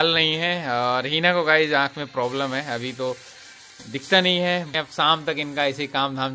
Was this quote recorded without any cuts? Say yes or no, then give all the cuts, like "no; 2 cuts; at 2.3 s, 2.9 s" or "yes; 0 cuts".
no; 1 cut; at 4.7 s